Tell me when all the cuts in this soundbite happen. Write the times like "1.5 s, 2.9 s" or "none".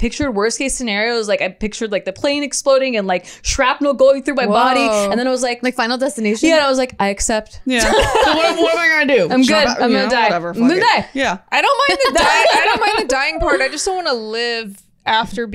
7.6 s